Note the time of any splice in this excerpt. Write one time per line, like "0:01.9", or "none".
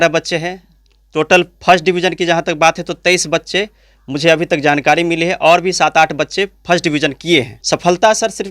0:07.6